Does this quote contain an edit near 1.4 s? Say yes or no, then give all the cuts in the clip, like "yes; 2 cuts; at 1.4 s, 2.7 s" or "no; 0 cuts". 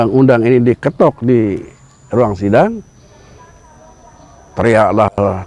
no; 0 cuts